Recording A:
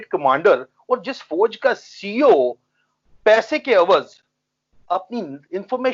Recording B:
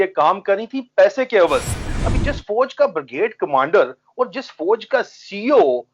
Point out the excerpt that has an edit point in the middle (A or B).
B